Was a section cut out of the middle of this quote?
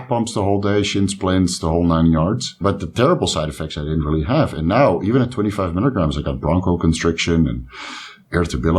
yes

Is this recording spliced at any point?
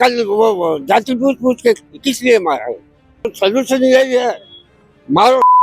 yes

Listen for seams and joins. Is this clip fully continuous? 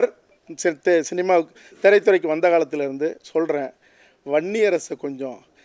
yes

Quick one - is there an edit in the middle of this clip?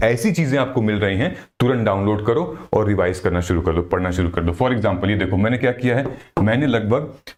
no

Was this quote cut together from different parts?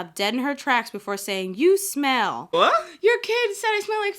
yes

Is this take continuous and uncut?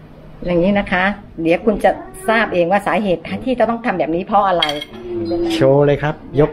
no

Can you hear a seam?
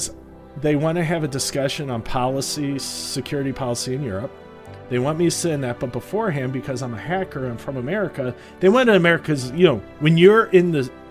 no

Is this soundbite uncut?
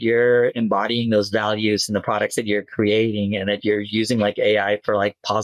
yes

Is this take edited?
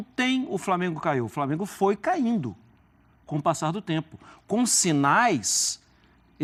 no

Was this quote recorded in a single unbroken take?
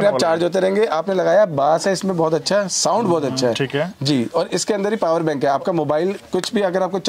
yes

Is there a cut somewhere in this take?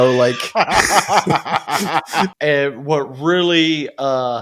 yes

